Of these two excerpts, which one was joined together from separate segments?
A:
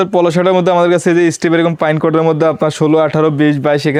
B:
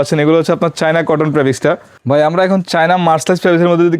B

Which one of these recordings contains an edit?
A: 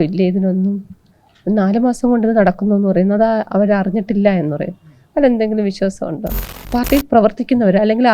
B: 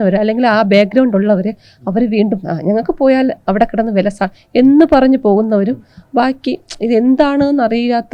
A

